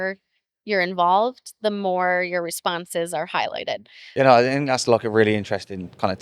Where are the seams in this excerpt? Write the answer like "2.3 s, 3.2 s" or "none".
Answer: 4.0 s